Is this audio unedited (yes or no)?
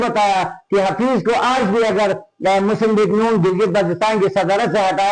yes